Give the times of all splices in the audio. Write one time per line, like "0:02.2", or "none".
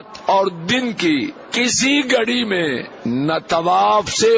0:01.4
0:02.9